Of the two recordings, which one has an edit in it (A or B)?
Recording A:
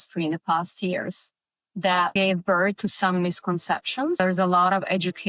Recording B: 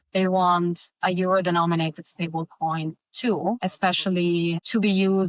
A